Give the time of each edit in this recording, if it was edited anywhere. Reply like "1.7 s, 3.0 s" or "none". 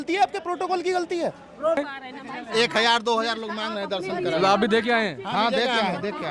1.8 s